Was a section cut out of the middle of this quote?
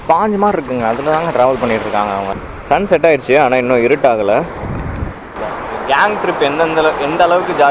yes; 2 cuts; at 2.3 s, 5.4 s

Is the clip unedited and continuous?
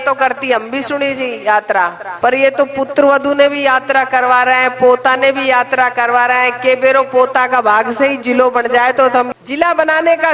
no; 2 cuts; at 2.0 s, 9.3 s

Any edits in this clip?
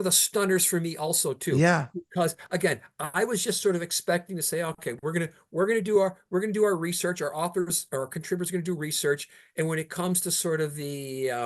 no; 0 cuts

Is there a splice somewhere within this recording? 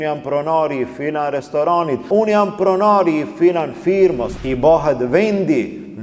yes; 2 cuts; at 2.0 s, 4.3 s

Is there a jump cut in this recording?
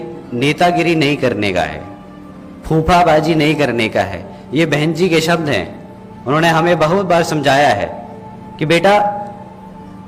no; 0 cuts

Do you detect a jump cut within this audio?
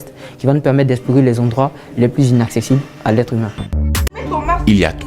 yes; 1 cut; at 3.8 s

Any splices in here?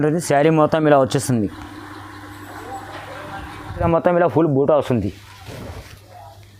yes; 1 cut; at 3.9 s

